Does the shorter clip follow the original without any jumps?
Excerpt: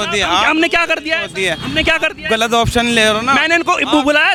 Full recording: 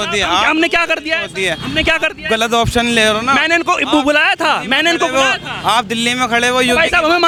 yes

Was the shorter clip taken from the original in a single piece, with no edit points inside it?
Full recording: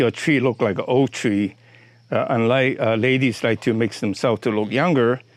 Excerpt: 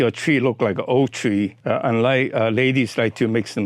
no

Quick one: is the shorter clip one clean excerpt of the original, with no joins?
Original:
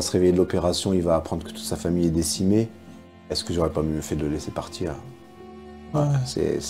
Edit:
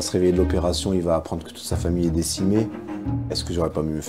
yes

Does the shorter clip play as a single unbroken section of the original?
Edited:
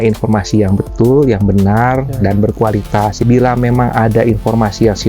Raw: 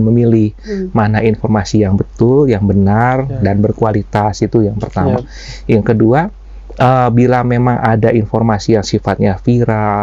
no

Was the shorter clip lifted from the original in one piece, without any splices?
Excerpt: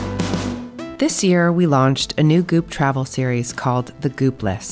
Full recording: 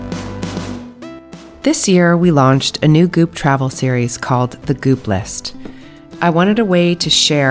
no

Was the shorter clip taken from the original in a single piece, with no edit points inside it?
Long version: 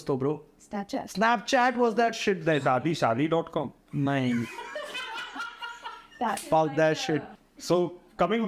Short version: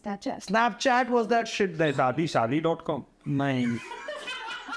yes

